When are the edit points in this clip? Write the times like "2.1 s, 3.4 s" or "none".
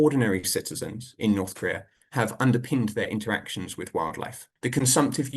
4.4 s

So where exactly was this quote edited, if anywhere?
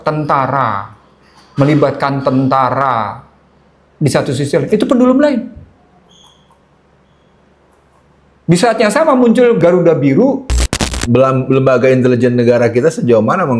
10.6 s

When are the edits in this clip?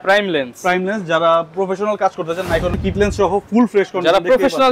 2.8 s

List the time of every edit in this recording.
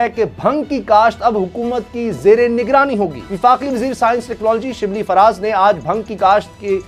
3.2 s

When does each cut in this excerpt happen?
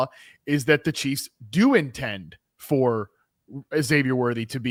none

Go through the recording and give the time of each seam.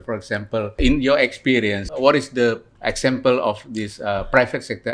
0.8 s, 1.8 s, 2.7 s

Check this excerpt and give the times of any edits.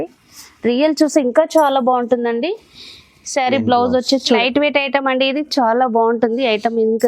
4.4 s

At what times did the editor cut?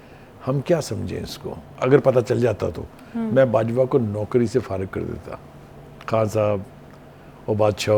1.7 s

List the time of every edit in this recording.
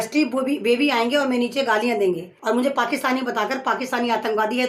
2.3 s

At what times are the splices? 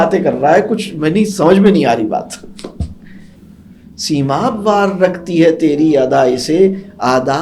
3.3 s

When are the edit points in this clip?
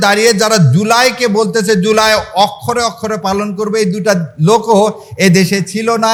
none

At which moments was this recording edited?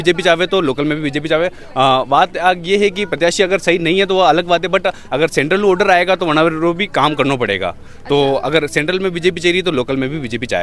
none

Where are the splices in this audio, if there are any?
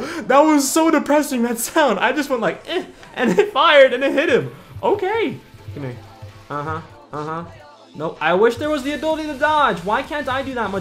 5.5 s

